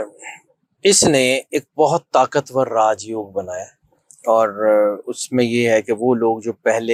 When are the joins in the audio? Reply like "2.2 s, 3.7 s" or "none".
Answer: none

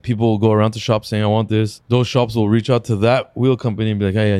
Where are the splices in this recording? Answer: 1.8 s

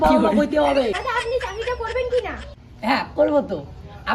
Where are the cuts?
1.1 s

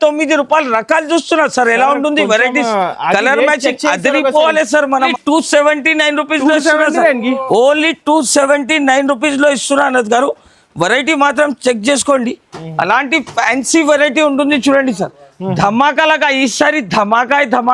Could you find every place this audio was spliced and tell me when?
5.1 s

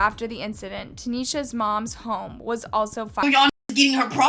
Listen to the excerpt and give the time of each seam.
3.2 s

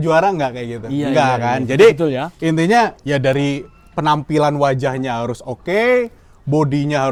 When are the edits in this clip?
none

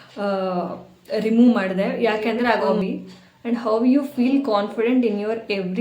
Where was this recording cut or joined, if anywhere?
2.7 s

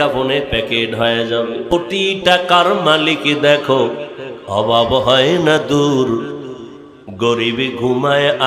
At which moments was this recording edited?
1.7 s

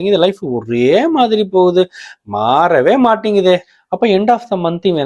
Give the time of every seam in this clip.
3.8 s

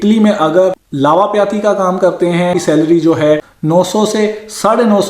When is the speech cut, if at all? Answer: 2.6 s

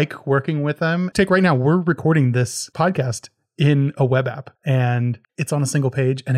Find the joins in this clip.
1.1 s, 2.6 s, 4.5 s, 5.2 s

